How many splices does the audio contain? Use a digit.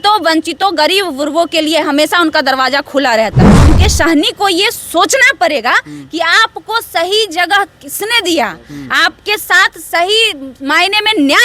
1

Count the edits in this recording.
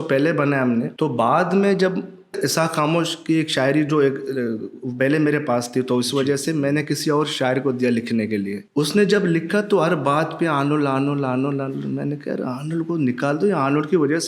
3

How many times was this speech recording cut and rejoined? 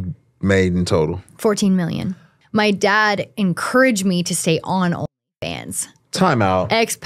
1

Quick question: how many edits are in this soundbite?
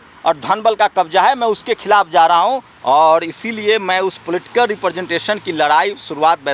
1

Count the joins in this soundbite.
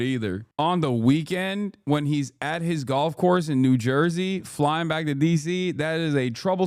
0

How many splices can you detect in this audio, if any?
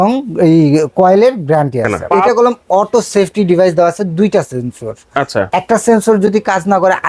1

